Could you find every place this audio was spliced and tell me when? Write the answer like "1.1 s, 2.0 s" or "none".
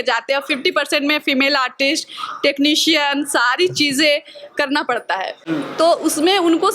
none